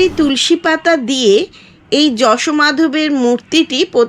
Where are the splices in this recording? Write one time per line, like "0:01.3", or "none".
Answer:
none